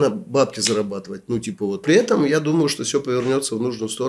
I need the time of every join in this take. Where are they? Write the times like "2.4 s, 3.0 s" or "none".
1.8 s